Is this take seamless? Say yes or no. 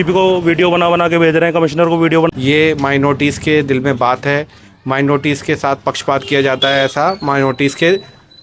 no